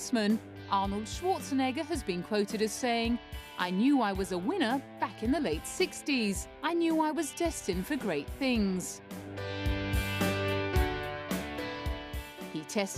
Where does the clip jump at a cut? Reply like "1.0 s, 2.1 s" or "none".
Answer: 3.2 s